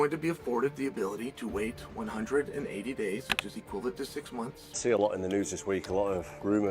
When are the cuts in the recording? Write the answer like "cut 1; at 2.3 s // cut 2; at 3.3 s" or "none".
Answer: cut 1; at 3.4 s // cut 2; at 4.6 s